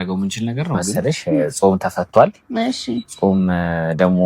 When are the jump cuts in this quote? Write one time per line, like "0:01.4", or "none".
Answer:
0:00.9